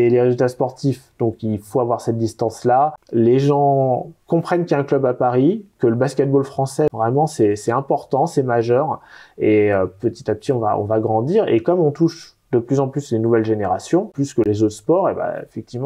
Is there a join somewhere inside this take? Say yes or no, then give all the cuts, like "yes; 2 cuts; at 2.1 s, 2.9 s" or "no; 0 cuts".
yes; 3 cuts; at 3.0 s, 6.9 s, 14.2 s